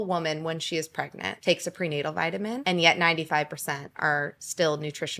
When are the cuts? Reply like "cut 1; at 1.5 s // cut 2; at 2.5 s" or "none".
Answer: cut 1; at 1.2 s // cut 2; at 2.6 s // cut 3; at 3.9 s